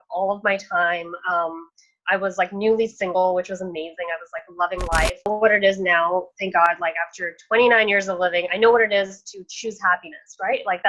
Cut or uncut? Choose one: cut